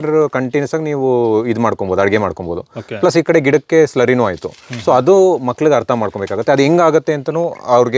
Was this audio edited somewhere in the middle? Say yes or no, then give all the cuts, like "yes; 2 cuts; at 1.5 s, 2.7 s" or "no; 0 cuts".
no; 0 cuts